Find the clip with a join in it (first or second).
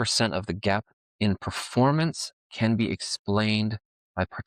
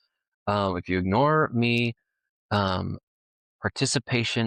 first